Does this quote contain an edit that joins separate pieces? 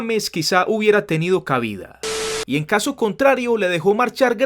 yes; 1 cut; at 2.4 s

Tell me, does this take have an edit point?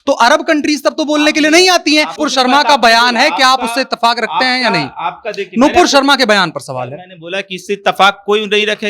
yes; 1 cut; at 2.2 s

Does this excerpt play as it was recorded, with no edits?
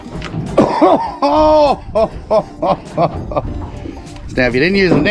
yes; 0 cuts

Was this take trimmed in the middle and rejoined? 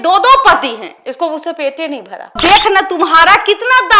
yes; 1 cut; at 2.4 s

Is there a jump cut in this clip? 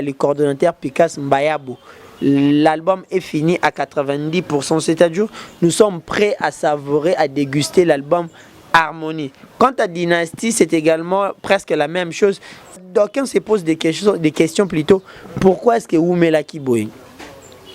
yes; 1 cut; at 12.8 s

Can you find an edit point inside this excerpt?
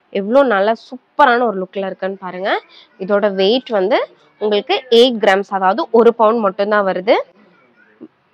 no; 0 cuts

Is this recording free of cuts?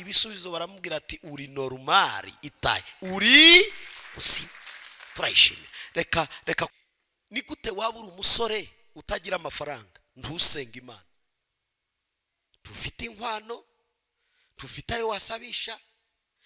no; 1 cut; at 6.7 s

